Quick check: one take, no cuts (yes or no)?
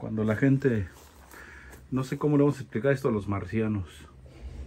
yes